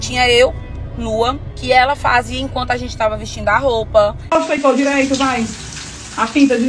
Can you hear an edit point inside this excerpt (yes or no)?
yes